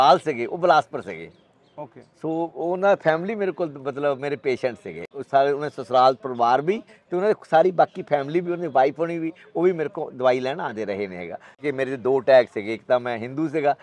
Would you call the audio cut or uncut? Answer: cut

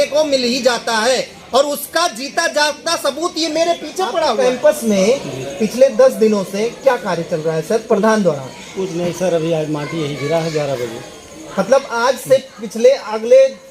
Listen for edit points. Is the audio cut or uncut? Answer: cut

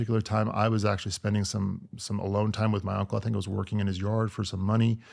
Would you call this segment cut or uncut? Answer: uncut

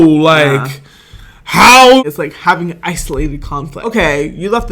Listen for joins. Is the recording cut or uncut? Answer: cut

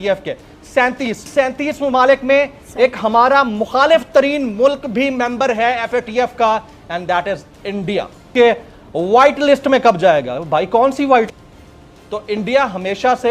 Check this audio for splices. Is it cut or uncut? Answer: cut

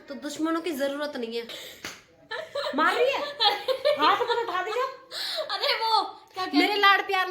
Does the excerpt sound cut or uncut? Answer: cut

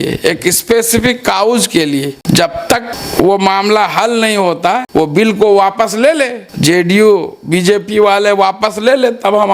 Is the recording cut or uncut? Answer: cut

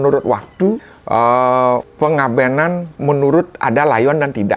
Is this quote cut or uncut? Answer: cut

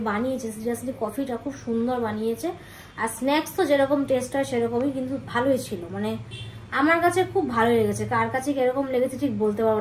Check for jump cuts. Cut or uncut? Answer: uncut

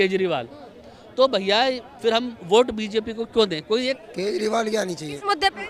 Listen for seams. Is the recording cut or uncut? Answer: cut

